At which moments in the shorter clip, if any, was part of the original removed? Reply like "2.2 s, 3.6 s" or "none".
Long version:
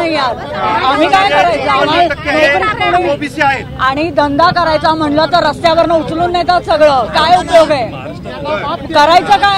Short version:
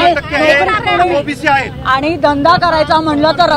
none